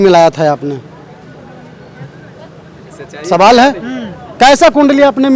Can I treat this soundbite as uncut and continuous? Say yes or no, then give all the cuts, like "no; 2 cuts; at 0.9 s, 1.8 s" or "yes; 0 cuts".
yes; 0 cuts